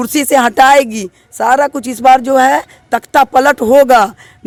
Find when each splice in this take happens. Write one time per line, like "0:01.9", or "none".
none